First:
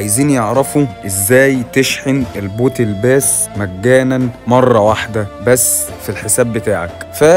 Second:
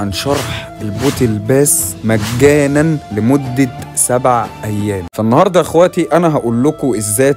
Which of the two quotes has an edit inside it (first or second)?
second